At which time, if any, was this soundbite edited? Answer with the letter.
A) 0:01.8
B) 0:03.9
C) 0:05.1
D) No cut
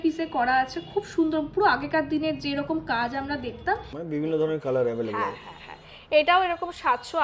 B